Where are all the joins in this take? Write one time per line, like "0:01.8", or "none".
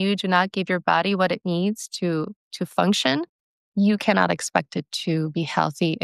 none